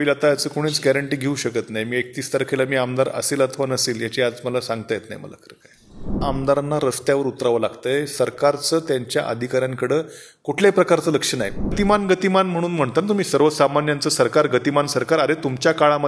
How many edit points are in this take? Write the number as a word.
two